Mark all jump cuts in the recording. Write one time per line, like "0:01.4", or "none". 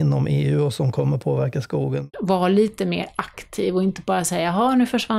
0:02.1